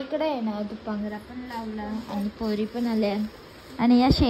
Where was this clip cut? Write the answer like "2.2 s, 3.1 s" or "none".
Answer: none

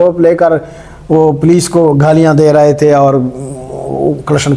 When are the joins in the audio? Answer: none

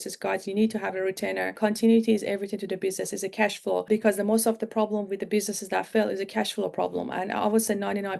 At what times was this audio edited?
1.5 s, 3.9 s

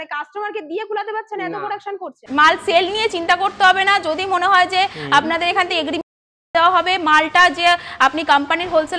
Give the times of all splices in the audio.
2.2 s

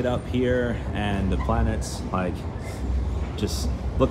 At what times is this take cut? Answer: none

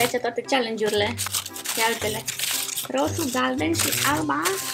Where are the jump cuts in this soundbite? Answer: none

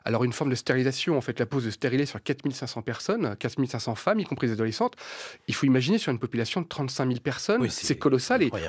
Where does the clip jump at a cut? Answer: none

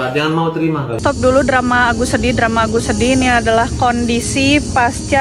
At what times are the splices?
1.0 s

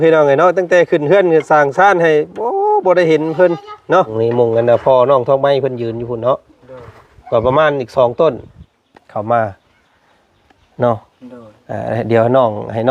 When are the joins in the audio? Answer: 4.1 s

